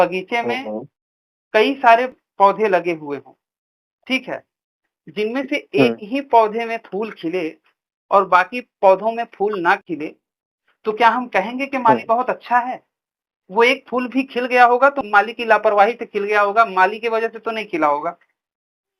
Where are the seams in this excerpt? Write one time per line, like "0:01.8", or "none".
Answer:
0:02.2
0:15.0